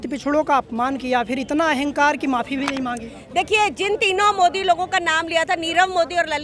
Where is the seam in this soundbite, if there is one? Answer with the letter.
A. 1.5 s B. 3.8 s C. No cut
C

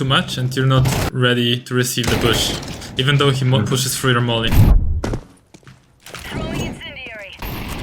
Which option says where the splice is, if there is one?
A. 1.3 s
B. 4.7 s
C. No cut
B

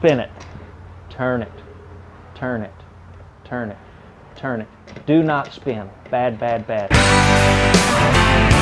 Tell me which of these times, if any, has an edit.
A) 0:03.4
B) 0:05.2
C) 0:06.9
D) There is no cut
C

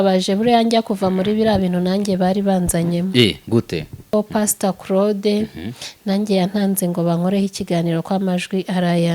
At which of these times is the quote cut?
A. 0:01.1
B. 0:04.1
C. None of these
B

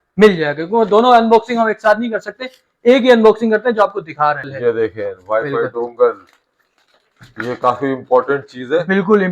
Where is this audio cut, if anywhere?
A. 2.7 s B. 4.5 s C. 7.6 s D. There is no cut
B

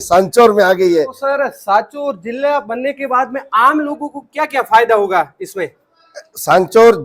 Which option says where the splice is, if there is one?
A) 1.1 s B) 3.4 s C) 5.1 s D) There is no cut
A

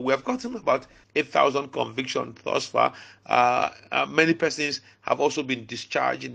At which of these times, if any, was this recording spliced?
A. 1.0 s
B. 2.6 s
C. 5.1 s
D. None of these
A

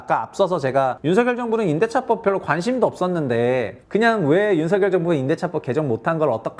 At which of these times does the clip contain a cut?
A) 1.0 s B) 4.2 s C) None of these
A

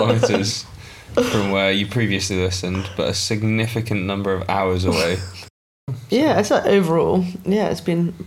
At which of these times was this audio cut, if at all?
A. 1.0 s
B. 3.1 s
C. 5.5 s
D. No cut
C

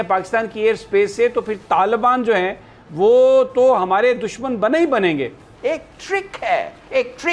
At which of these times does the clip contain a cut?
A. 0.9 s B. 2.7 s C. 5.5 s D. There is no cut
C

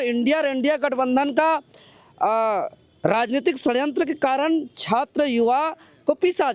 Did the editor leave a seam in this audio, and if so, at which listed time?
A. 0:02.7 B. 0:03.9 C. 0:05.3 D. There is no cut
D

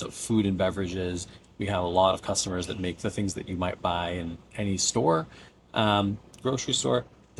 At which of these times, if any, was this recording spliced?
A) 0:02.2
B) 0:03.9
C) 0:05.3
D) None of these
D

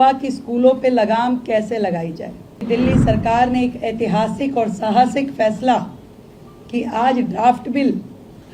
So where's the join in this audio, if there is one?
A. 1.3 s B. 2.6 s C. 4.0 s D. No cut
B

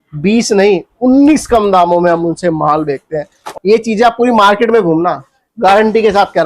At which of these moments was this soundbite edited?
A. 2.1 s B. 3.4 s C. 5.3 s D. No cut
B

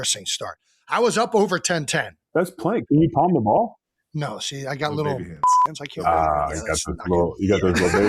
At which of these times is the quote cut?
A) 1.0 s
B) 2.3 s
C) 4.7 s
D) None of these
B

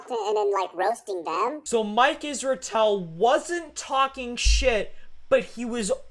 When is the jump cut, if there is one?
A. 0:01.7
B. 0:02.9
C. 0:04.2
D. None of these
A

